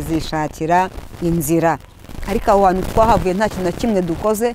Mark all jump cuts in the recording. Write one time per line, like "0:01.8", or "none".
0:02.1